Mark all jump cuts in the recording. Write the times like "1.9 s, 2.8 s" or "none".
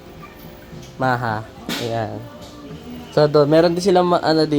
1.0 s